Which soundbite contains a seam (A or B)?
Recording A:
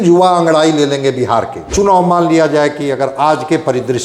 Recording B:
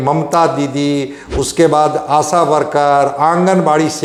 A